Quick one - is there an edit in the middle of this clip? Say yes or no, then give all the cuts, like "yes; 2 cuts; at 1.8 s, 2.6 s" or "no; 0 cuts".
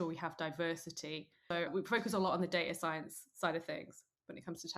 yes; 1 cut; at 1.7 s